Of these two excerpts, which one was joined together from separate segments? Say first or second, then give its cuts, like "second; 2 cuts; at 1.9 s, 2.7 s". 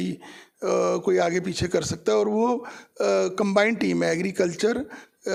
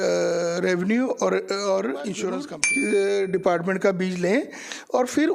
second; 1 cut; at 2.5 s